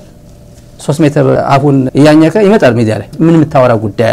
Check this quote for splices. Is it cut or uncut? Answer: cut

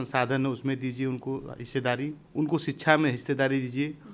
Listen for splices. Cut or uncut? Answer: cut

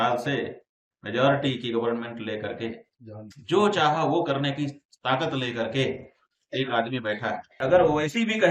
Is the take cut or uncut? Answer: cut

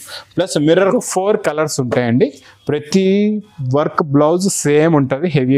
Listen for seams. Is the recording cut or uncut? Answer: cut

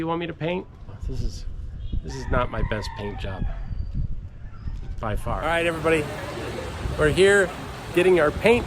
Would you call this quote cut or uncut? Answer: cut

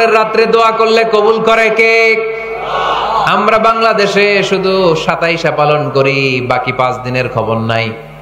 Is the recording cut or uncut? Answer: uncut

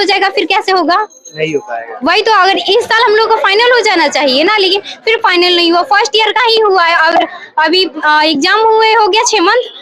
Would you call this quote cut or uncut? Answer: uncut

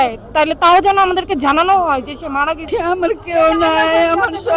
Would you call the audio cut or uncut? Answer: cut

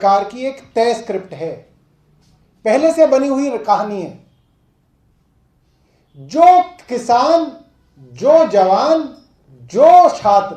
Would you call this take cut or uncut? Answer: uncut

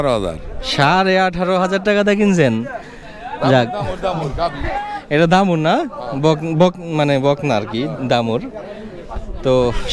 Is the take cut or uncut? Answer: uncut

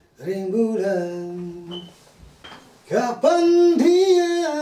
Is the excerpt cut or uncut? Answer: cut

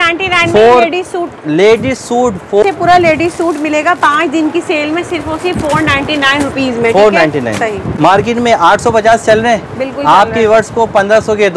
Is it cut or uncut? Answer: cut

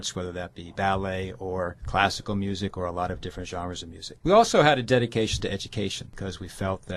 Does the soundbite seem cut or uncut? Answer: cut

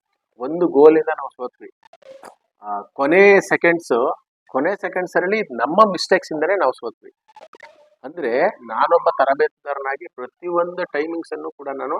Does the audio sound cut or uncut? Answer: uncut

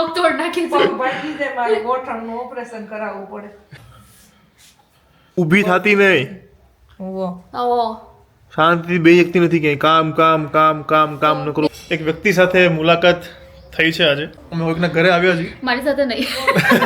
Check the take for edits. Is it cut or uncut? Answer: cut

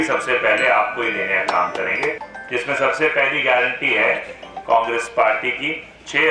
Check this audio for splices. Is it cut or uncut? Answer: cut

